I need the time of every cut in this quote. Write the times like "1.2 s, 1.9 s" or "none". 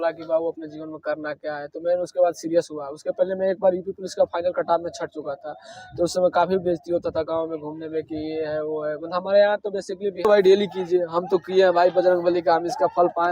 10.2 s